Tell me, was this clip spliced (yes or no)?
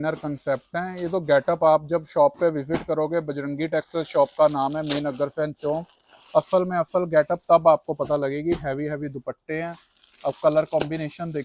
no